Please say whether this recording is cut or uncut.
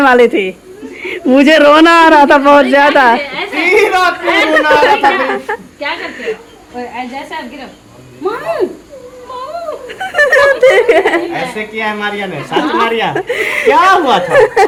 uncut